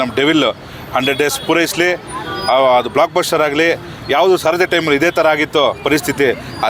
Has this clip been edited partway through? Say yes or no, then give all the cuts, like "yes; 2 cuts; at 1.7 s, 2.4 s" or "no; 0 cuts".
no; 0 cuts